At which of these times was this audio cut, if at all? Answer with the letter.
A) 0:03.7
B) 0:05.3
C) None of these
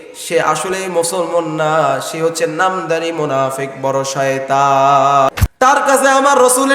B